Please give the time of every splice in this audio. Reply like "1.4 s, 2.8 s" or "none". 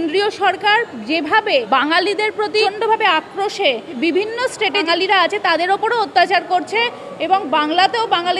1.7 s, 2.6 s, 3.9 s, 4.8 s